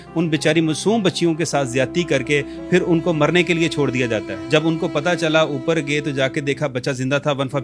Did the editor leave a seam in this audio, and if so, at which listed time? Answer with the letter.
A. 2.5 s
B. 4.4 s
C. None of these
B